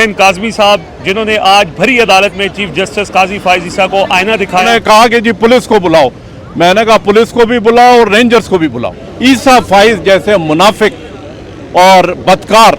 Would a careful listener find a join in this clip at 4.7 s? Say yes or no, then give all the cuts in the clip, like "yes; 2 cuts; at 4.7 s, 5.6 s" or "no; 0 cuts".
yes; 2 cuts; at 4.7 s, 9.0 s